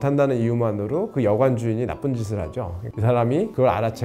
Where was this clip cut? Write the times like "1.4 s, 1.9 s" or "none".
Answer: 2.9 s